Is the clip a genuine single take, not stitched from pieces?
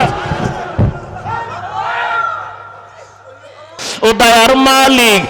no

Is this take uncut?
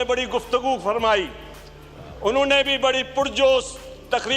yes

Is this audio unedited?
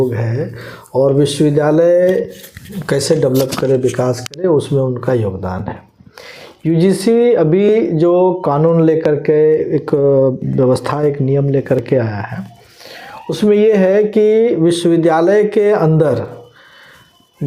yes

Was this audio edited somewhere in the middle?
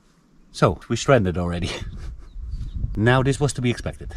yes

